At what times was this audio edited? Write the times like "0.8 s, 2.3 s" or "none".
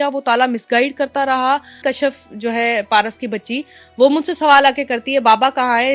1.8 s